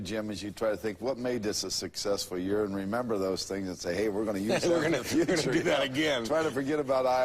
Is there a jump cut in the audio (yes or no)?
yes